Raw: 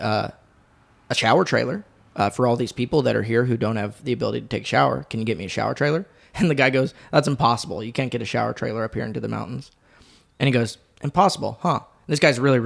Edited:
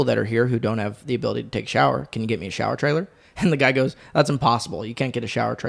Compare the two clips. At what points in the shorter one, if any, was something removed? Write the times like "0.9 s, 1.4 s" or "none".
none